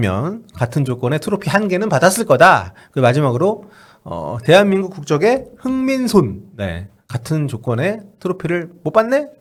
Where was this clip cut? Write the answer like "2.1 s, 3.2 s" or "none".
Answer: none